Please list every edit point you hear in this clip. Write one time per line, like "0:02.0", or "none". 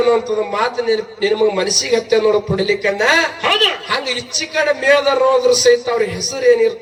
none